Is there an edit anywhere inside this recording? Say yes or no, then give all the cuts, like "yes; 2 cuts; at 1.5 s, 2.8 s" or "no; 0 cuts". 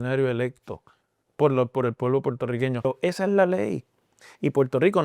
yes; 1 cut; at 2.8 s